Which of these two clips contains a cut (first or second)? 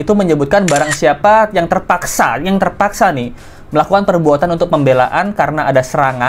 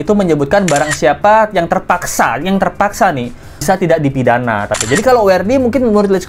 second